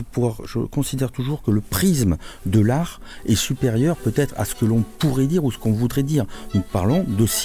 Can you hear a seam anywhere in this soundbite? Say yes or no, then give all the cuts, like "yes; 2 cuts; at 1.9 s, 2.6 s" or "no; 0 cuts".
no; 0 cuts